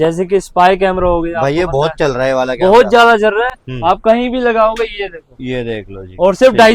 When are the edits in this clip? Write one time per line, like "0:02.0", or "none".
none